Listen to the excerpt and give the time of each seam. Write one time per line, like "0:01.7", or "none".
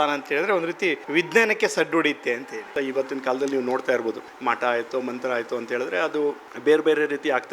0:01.0
0:02.7
0:04.3
0:06.5